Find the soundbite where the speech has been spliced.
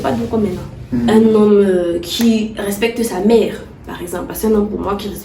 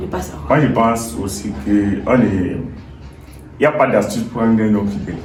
first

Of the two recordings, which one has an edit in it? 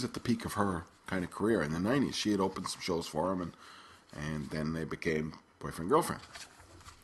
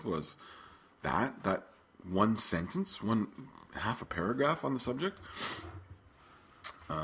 second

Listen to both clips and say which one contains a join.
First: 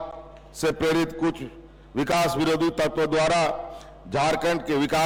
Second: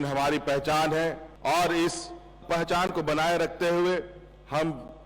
second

